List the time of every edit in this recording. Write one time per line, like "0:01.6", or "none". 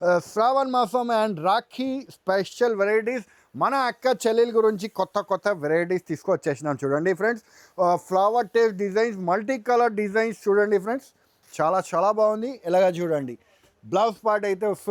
none